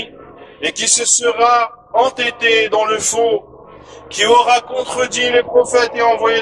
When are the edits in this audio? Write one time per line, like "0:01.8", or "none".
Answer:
none